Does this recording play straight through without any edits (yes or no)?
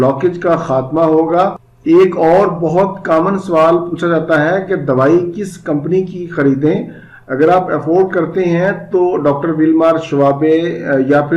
yes